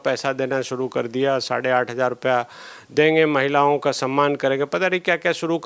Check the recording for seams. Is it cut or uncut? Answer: uncut